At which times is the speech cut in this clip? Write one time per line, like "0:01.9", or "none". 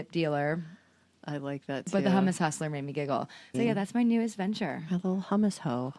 0:03.4

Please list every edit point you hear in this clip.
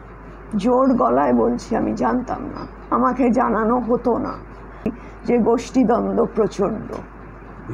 0:05.0

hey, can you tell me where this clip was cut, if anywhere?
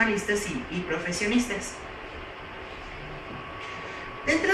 none

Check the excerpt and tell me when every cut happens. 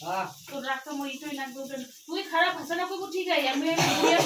none

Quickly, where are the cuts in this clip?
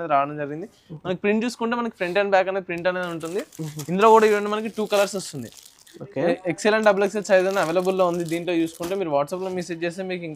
none

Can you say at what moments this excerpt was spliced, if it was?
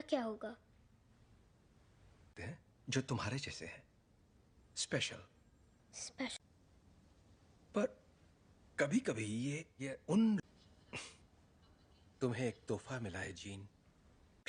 none

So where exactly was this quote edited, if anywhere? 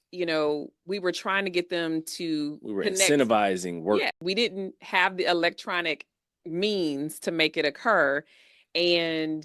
0:04.2

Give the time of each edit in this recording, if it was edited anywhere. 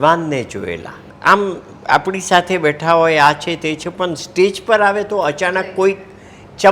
0:01.1

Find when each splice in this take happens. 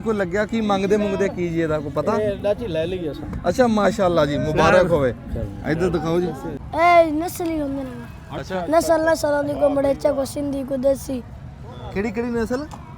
0:06.6

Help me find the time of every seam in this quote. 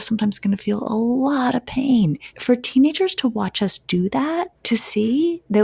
0:02.3
0:04.6

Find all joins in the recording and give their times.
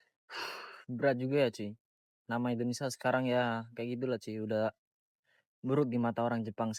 none

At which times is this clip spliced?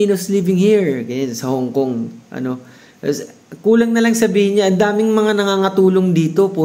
none

